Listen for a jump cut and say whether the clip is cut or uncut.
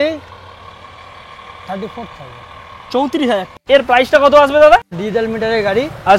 cut